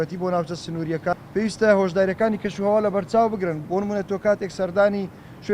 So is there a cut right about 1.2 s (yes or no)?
yes